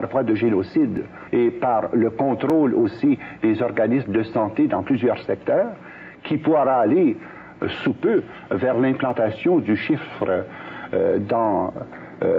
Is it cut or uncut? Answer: cut